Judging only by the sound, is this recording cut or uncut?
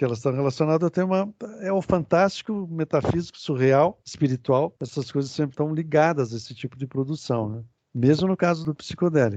uncut